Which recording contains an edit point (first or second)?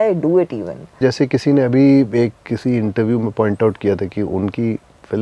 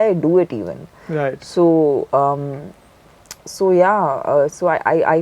first